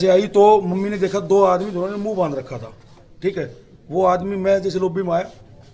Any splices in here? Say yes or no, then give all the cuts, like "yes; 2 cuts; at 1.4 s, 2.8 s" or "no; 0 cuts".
no; 0 cuts